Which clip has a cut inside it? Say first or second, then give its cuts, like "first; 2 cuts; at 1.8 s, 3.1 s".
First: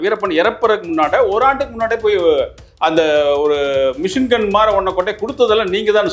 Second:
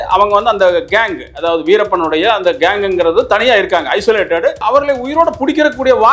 second; 1 cut; at 4.6 s